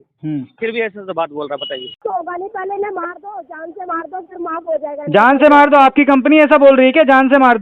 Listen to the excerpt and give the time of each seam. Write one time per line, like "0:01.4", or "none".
0:01.9

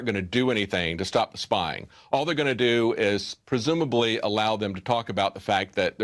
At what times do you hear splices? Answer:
none

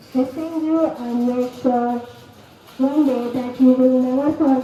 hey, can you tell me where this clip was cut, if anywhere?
none

